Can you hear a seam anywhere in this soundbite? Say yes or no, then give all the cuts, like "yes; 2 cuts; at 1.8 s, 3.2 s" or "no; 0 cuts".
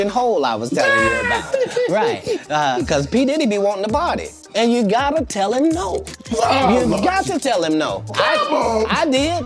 no; 0 cuts